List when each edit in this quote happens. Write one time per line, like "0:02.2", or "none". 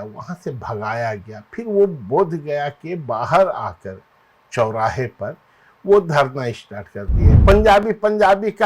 0:07.3